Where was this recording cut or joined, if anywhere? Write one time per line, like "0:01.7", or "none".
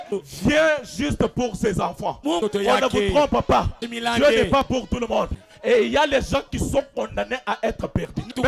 0:05.3